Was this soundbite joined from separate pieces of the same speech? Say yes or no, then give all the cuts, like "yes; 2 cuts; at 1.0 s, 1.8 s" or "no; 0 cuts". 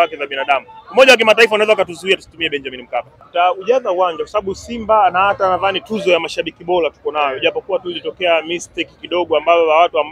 yes; 1 cut; at 3.2 s